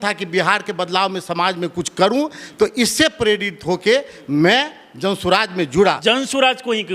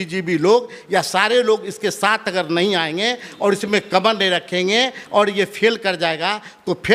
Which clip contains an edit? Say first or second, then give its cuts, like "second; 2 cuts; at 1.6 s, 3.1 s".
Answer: first; 1 cut; at 6.0 s